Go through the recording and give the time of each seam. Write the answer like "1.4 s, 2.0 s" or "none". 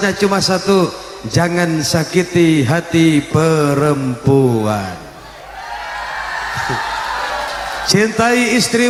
none